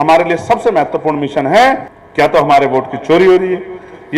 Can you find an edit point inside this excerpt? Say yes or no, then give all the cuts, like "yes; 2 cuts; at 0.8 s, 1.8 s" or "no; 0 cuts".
yes; 1 cut; at 2.0 s